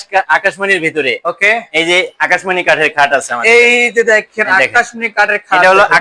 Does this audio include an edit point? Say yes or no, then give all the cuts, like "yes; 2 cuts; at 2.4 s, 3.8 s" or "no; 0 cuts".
no; 0 cuts